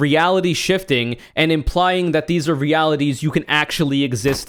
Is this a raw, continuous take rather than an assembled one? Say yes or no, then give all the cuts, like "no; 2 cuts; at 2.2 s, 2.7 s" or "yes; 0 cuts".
yes; 0 cuts